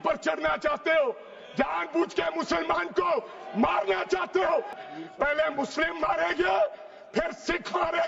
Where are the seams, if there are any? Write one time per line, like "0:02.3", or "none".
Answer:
0:04.9